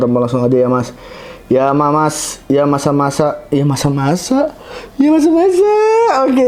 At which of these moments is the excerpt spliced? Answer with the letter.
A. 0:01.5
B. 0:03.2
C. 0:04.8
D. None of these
D